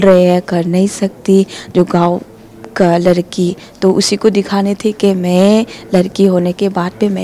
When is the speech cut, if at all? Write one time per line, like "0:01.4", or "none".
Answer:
none